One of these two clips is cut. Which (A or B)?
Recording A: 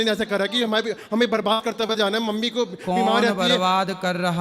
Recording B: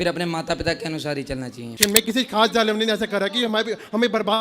B